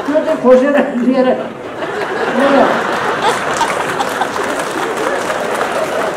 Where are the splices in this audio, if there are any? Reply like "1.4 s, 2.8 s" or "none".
none